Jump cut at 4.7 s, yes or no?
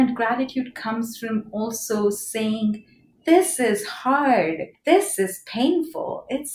yes